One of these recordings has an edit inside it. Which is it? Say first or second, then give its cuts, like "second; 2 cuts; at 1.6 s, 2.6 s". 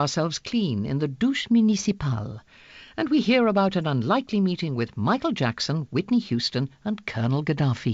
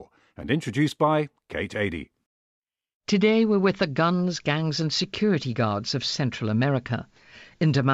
first; 1 cut; at 5.1 s